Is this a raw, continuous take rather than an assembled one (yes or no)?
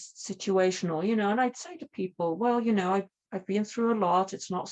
yes